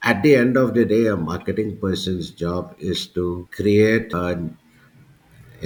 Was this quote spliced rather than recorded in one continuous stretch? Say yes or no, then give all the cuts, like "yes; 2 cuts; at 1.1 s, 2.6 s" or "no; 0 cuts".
no; 0 cuts